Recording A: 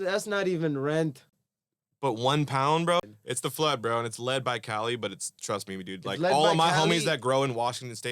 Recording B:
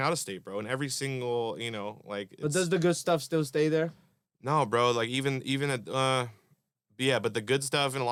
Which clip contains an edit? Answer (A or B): A